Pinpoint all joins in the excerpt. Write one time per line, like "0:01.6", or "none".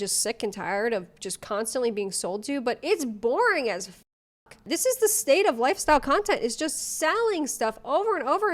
0:04.6

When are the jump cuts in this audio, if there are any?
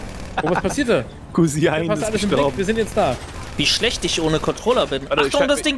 0:03.4

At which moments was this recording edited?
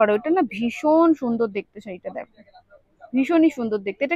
none

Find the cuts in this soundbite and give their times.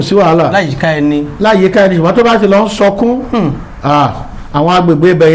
none

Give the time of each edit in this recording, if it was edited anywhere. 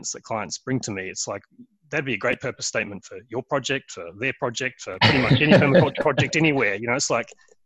none

